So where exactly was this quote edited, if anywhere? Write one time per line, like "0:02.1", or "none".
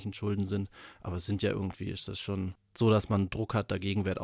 0:02.6